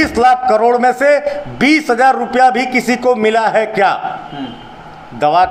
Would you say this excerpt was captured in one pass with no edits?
yes; 0 cuts

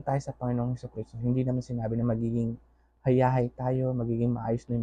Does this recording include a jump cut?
no; 0 cuts

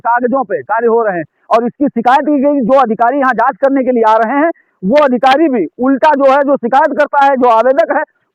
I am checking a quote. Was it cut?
no; 0 cuts

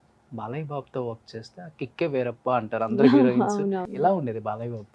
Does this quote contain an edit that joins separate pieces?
yes; 1 cut; at 3.9 s

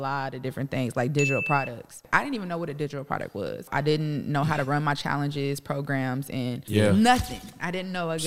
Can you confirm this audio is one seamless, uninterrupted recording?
no; 3 cuts; at 2.0 s, 3.7 s, 6.6 s

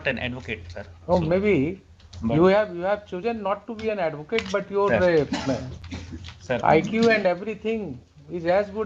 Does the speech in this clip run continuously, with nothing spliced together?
yes; 0 cuts

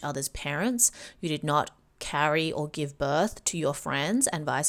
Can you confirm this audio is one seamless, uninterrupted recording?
yes; 0 cuts

